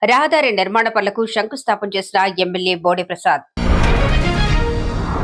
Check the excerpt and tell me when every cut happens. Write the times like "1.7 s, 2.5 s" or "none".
3.5 s